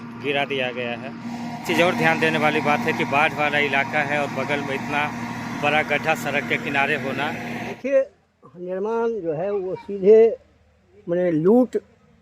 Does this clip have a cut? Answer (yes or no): yes